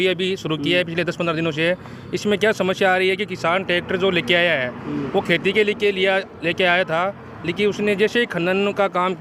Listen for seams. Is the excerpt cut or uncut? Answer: uncut